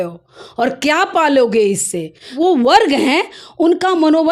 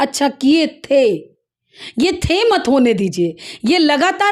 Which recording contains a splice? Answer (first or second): first